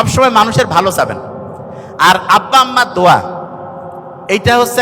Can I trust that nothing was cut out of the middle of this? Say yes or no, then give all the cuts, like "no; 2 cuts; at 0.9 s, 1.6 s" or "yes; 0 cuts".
yes; 0 cuts